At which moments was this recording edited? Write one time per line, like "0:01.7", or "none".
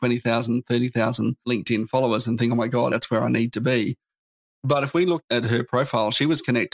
0:01.5
0:02.9
0:05.2